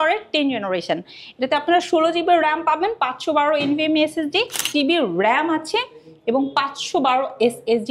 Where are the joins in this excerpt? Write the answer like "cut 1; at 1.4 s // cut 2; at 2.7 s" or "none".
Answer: cut 1; at 4.7 s